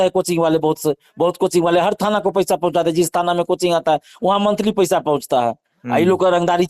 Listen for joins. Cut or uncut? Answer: uncut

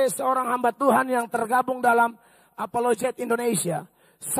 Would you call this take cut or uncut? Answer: uncut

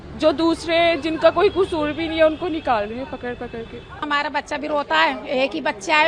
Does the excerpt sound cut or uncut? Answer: cut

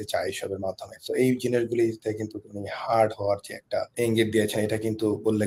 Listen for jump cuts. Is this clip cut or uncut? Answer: cut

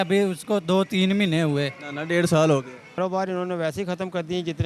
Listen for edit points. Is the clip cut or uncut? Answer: cut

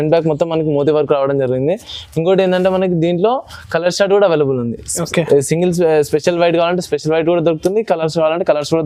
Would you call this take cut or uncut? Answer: uncut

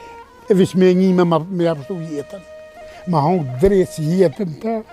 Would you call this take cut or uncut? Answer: uncut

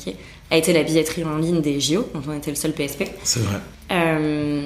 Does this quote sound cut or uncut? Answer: uncut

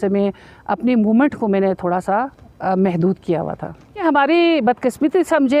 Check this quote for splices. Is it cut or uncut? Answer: cut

